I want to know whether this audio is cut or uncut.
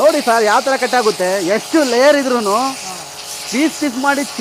uncut